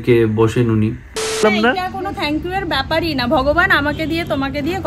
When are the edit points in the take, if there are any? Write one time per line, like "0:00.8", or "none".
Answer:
0:01.4